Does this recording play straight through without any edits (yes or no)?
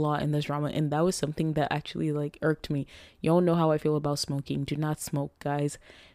yes